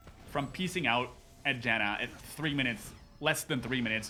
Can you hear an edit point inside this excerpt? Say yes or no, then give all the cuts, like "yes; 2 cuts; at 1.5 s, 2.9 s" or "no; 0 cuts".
no; 0 cuts